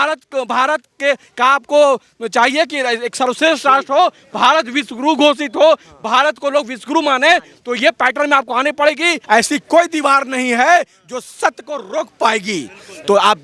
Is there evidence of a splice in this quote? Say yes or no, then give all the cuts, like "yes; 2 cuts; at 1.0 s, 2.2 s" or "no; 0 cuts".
yes; 1 cut; at 9.2 s